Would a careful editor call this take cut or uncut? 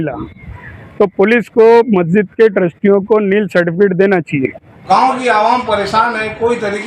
cut